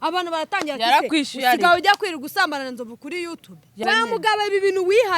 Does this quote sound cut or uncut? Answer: cut